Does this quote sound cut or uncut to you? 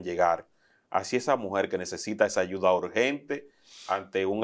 uncut